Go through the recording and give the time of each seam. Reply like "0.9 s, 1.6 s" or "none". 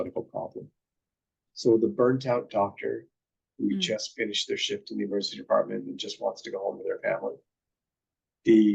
none